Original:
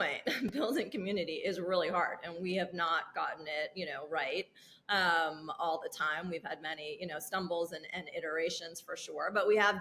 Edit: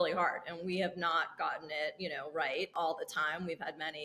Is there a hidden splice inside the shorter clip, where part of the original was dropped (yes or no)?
yes